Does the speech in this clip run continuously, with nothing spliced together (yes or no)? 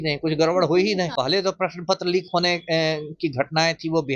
no